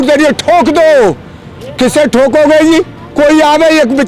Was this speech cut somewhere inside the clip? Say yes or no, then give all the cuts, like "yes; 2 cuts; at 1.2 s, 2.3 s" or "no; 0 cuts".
no; 0 cuts